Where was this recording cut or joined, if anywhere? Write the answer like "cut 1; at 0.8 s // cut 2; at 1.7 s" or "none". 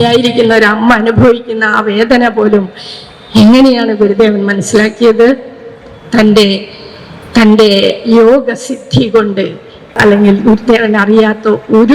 cut 1; at 9.9 s